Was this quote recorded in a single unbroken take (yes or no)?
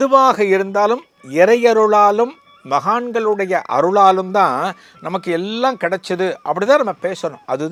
yes